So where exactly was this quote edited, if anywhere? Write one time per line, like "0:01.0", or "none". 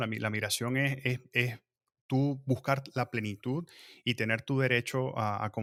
none

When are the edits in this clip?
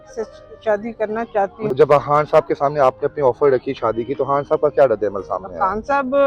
0:01.7

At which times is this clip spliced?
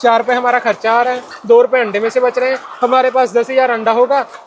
none

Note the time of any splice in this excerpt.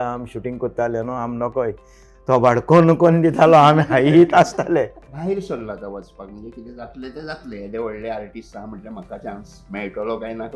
0:05.1

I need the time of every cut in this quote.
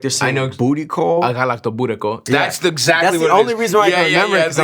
0:02.2

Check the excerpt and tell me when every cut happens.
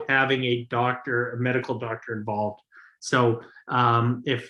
none

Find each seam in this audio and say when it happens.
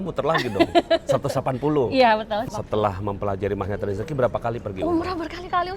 0:02.5

